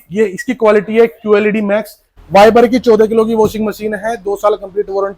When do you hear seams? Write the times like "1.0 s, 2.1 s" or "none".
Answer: 2.1 s